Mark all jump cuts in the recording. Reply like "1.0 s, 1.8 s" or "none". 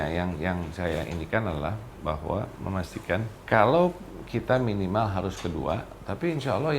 3.3 s

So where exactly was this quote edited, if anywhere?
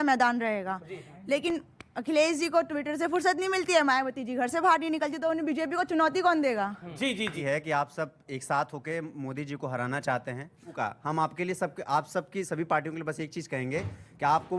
7.4 s, 10.7 s

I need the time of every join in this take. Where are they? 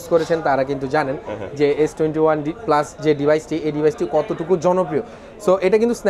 none

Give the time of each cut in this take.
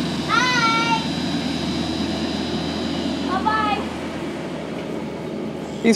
none

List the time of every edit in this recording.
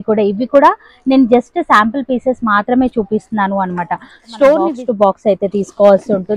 4.8 s

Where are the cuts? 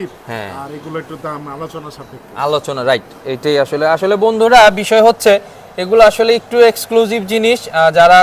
none

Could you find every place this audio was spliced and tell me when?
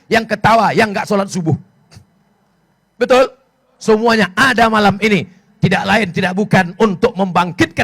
3.7 s

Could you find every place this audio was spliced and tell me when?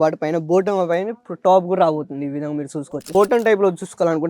3.1 s

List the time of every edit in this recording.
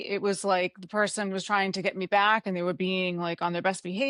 none

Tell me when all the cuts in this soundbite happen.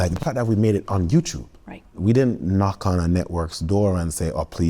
2.0 s

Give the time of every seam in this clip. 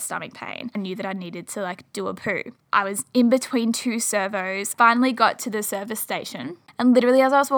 0.8 s, 2.6 s, 4.7 s, 6.6 s

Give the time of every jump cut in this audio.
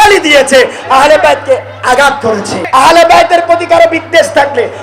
2.6 s

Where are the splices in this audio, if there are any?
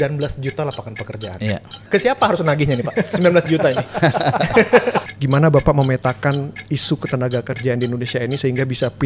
1.9 s, 5.1 s

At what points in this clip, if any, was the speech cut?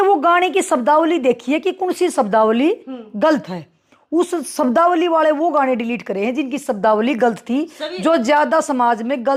none

